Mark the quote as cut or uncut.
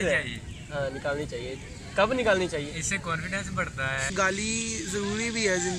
cut